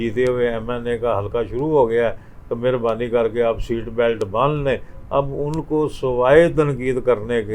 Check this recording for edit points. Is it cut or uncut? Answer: uncut